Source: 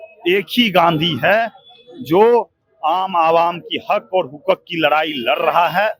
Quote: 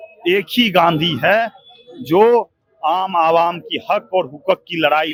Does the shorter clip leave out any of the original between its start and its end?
no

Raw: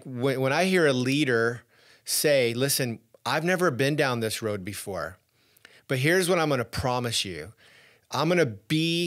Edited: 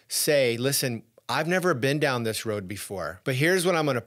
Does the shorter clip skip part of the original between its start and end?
yes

